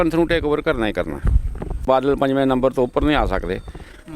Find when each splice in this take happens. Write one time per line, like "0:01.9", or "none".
0:01.8